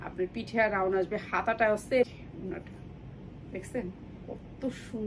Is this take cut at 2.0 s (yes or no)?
yes